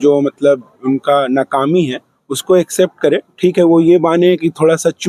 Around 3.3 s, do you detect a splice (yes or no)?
no